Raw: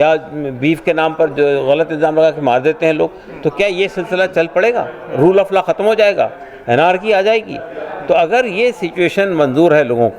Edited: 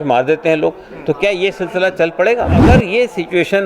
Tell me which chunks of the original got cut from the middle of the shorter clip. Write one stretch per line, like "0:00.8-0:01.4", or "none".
0:05.0-0:08.3

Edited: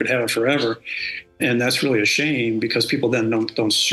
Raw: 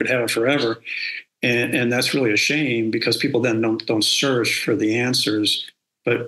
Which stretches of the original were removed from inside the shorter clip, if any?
0:01.4-0:01.7

